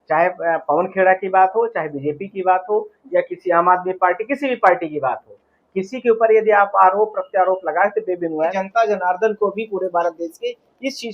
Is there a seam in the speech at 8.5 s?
yes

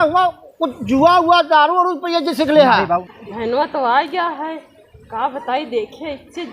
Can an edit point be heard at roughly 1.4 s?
no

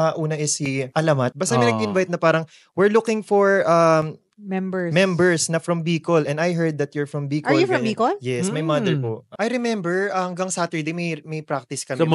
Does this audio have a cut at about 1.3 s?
yes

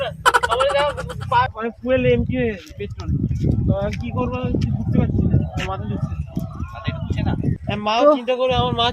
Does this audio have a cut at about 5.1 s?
no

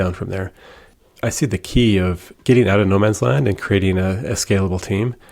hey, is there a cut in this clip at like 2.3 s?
yes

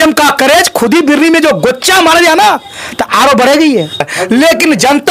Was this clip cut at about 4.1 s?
yes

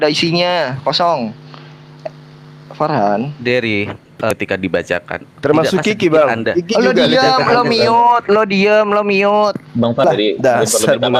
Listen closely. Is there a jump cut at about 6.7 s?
no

